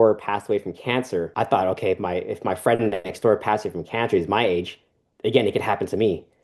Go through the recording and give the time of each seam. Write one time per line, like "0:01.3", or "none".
none